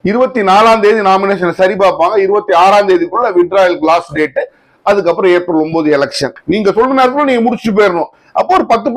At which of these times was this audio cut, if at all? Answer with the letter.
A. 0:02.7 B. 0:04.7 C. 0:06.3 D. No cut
C